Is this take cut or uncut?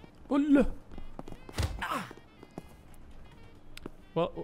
cut